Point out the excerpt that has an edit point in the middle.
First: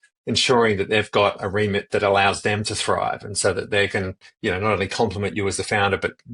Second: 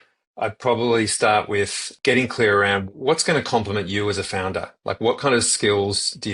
second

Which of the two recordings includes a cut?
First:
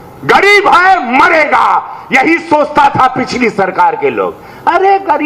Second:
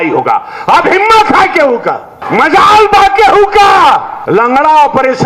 second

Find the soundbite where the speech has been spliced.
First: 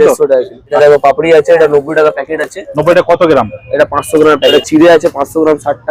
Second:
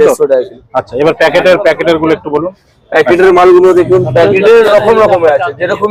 first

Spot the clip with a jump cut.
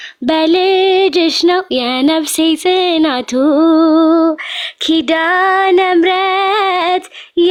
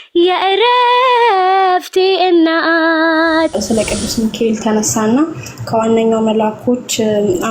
second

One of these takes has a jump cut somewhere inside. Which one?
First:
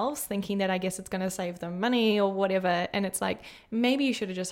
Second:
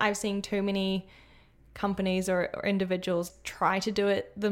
second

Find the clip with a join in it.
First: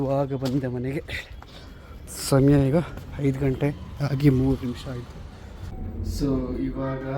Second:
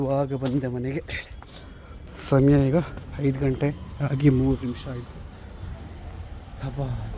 first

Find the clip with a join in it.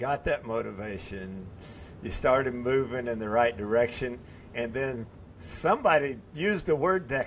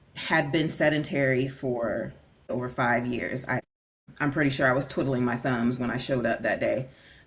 second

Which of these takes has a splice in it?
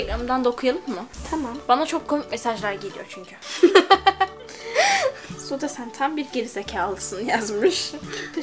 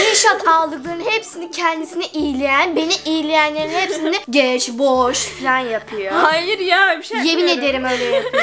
first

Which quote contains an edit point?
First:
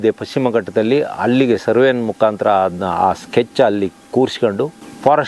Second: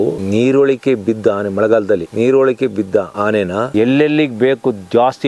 second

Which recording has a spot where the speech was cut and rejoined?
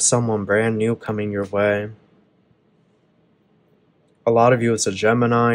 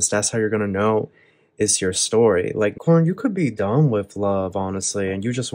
second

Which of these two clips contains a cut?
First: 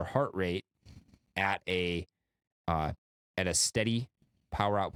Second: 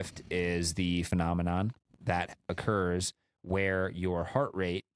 second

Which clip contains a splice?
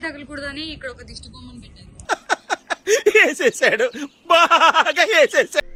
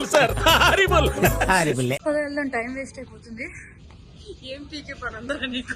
second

